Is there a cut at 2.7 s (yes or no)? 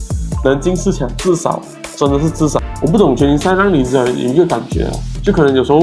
yes